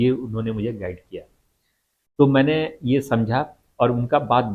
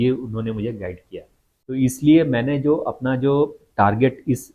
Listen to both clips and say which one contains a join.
second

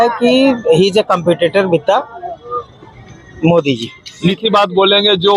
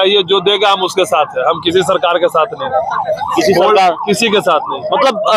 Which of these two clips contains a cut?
first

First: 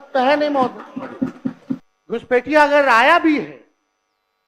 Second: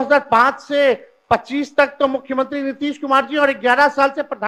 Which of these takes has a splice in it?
first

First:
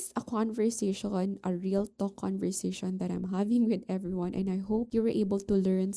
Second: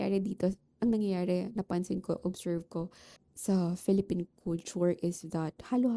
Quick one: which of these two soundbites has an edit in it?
first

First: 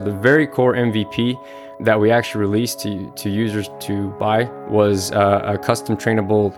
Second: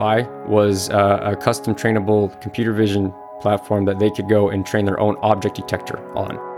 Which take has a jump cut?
first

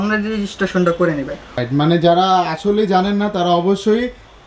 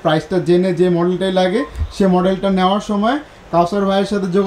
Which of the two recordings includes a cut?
first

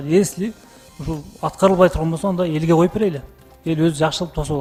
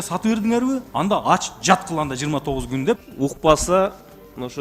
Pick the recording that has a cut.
second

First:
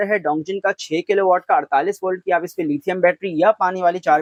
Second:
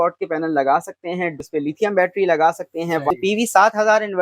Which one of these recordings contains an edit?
second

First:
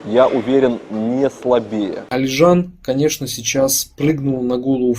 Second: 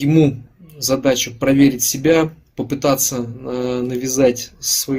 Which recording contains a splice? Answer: first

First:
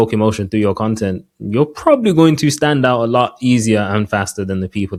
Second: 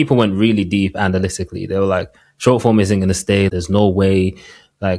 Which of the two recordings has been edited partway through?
second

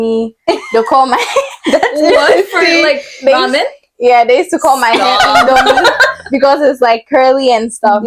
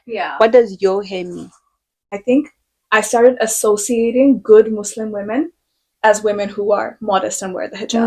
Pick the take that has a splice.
second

